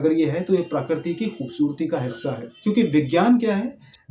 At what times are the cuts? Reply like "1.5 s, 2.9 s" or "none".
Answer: 2.5 s